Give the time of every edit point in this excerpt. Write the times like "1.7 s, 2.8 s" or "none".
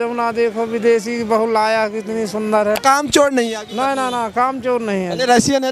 2.8 s